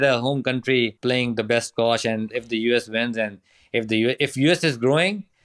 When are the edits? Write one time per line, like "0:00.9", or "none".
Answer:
0:01.0
0:02.3